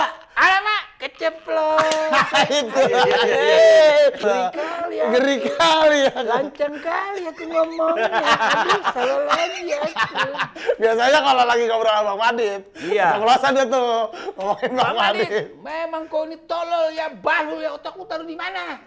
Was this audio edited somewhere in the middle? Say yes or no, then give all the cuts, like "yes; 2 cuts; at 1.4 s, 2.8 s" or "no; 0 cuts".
yes; 1 cut; at 4.2 s